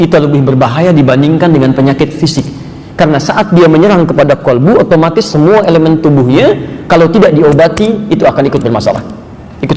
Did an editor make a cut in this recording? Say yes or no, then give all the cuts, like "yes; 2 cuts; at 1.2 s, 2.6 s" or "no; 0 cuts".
no; 0 cuts